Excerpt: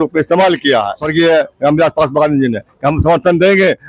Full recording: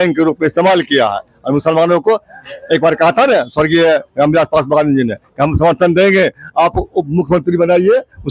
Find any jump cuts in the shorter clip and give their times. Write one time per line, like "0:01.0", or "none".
0:01.0